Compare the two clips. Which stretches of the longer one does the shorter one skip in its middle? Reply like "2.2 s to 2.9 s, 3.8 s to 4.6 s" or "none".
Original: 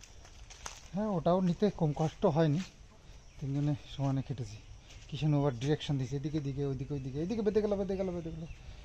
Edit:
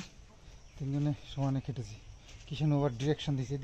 none